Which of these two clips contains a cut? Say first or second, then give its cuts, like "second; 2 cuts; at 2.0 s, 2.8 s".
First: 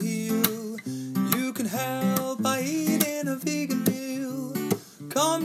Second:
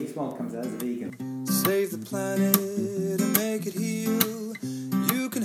second; 1 cut; at 1.3 s